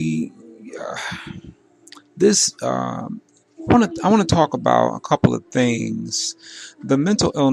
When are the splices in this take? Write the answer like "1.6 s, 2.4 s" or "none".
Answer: 3.4 s